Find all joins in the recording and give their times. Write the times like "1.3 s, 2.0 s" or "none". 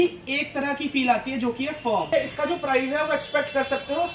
2.1 s